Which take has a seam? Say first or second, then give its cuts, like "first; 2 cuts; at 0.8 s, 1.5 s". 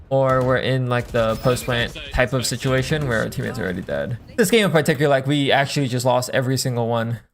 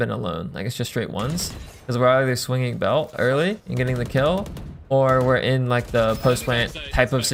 first; 1 cut; at 4.2 s